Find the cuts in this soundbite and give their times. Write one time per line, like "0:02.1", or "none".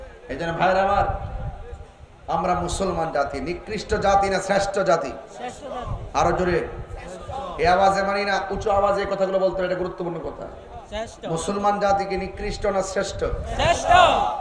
none